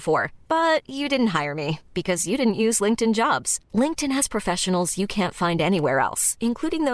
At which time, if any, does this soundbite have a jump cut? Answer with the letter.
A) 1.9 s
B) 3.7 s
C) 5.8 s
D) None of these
D